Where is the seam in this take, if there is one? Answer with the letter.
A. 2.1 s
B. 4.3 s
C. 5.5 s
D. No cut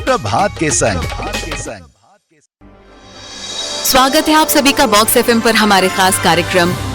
A